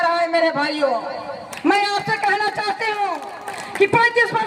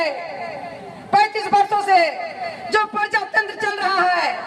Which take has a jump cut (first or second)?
first